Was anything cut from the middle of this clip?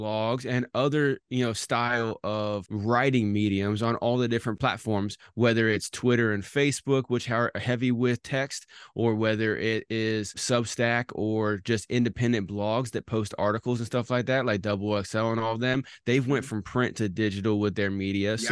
yes; 3 cuts; at 2.7 s, 4.5 s, 10.4 s

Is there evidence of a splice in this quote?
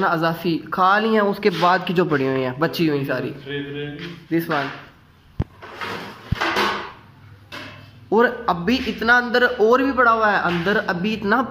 no; 0 cuts

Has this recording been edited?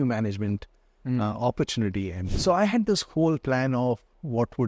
yes; 1 cut; at 2.3 s

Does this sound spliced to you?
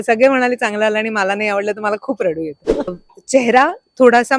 yes; 1 cut; at 2.9 s

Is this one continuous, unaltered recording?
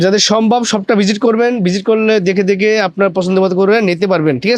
yes; 0 cuts

